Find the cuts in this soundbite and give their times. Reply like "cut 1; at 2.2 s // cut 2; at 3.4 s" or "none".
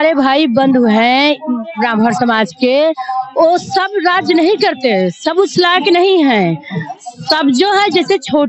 none

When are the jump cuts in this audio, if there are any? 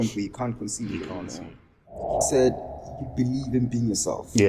cut 1; at 2.1 s

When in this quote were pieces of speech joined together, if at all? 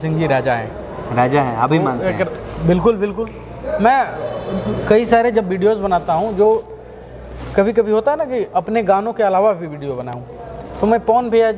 none

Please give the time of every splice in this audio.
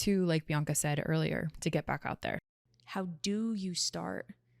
cut 1; at 2.4 s

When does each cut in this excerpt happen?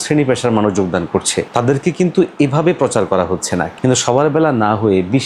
cut 1; at 3.7 s

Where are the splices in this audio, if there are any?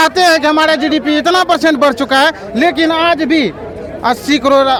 none

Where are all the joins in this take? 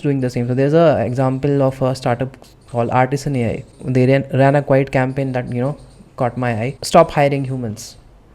cut 1; at 3.8 s // cut 2; at 6.8 s

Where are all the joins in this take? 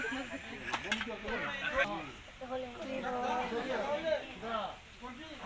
cut 1; at 1.3 s

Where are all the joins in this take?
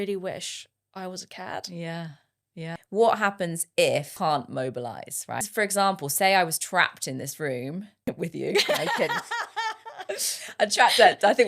cut 1; at 2.8 s // cut 2; at 4.1 s // cut 3; at 5.4 s // cut 4; at 7.9 s

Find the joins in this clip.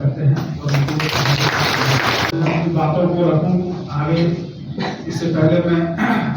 cut 1; at 2.3 s

